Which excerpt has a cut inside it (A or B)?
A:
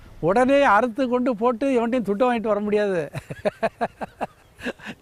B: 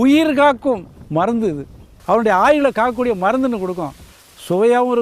B